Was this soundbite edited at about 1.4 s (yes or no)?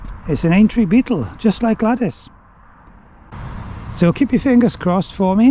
no